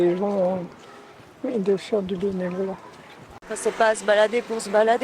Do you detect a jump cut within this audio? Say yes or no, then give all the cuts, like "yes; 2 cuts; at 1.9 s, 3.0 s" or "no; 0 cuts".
yes; 1 cut; at 3.5 s